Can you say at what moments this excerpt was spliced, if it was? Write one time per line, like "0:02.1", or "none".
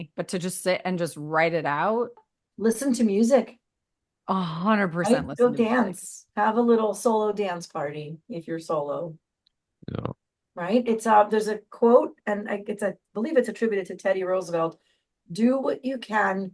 0:02.3